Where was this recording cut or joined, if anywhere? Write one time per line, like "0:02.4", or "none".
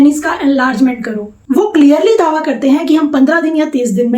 0:01.3